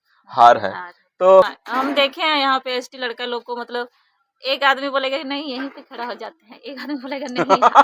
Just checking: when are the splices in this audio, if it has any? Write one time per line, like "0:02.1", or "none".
0:01.5